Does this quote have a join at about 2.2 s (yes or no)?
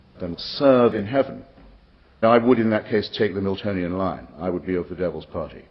yes